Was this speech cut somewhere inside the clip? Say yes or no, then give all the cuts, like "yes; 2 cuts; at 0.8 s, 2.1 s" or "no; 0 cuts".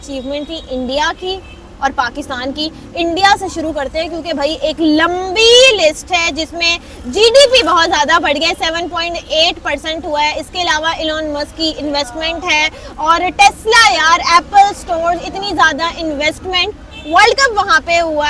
no; 0 cuts